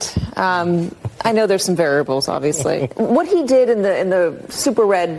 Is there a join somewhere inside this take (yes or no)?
yes